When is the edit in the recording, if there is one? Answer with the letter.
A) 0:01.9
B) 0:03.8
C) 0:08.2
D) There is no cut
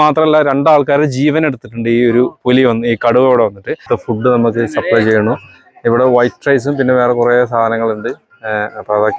B